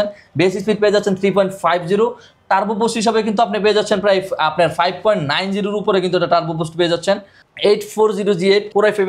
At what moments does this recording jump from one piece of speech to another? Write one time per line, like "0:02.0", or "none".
0:07.4